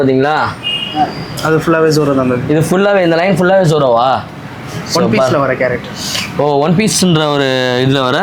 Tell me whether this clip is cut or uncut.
uncut